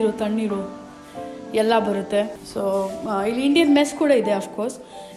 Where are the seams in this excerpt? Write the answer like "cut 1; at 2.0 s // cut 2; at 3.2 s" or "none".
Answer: cut 1; at 2.4 s